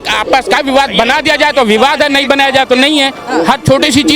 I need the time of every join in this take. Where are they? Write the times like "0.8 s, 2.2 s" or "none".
none